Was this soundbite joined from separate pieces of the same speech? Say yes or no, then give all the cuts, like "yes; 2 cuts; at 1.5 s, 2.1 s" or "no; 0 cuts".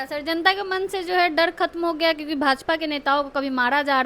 no; 0 cuts